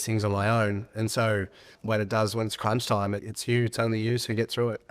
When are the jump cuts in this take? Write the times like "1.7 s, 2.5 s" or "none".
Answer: 1.7 s, 3.3 s

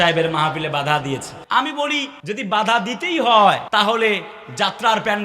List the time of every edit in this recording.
1.3 s, 2.1 s, 3.6 s

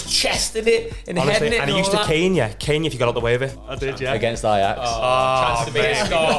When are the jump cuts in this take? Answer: 3.6 s

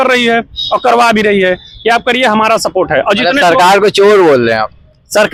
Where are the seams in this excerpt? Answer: none

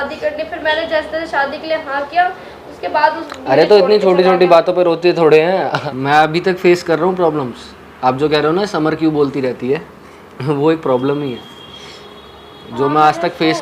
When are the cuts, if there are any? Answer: 5.8 s

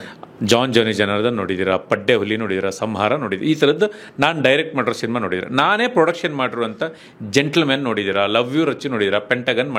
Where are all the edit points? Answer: none

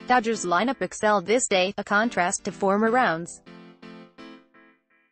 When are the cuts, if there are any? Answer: 3.8 s

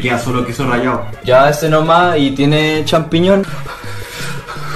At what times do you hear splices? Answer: 1.1 s

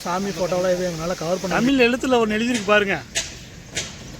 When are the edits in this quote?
1.5 s

